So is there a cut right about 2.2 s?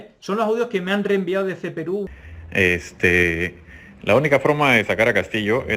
yes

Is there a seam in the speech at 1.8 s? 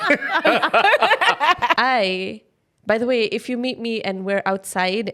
yes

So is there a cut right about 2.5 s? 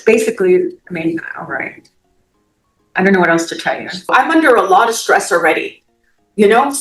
no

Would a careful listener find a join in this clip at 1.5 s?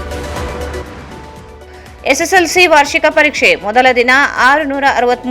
yes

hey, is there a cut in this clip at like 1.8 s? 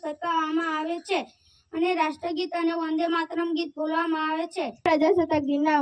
no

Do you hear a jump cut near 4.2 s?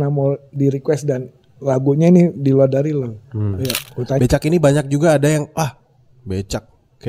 yes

